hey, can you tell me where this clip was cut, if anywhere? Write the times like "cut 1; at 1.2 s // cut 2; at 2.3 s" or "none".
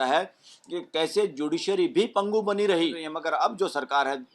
cut 1; at 3.1 s